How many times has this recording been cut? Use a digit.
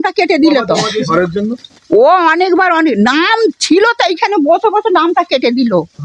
1